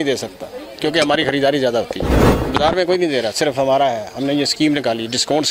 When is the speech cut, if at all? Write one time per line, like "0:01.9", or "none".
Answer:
0:02.3